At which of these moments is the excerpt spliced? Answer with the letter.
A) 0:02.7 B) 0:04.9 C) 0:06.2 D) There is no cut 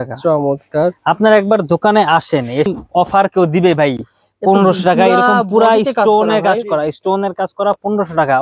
A